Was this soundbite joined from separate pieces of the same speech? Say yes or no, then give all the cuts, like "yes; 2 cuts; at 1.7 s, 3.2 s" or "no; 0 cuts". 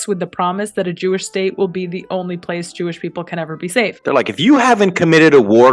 yes; 1 cut; at 4.0 s